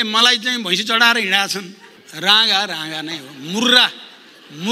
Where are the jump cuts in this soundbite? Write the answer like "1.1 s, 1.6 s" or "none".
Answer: none